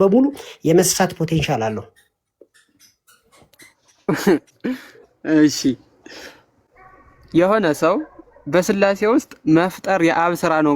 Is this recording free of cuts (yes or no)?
yes